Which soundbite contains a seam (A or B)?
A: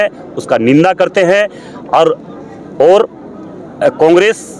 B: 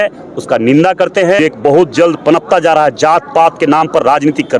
B